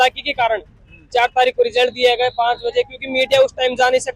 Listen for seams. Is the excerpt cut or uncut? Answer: uncut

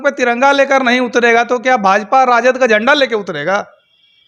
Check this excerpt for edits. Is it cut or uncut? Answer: uncut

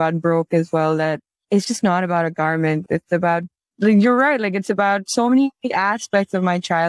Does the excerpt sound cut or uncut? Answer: uncut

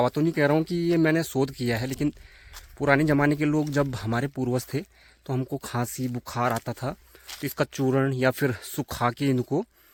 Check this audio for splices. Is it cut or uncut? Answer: uncut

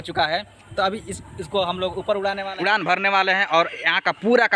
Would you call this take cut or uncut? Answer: cut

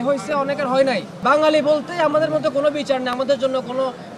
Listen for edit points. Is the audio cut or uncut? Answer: cut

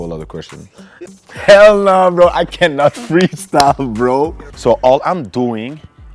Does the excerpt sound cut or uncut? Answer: cut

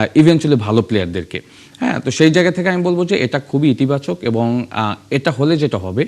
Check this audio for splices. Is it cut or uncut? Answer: uncut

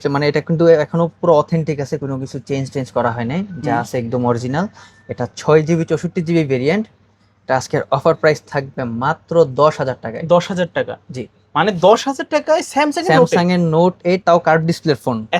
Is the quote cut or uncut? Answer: uncut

